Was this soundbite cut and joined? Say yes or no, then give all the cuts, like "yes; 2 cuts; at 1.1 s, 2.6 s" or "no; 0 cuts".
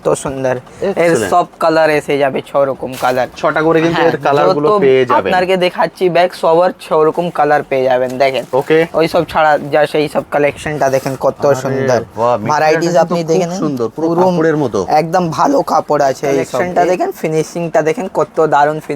yes; 1 cut; at 16.6 s